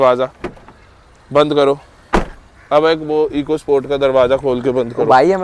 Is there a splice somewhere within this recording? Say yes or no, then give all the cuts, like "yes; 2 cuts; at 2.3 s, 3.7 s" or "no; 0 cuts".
no; 0 cuts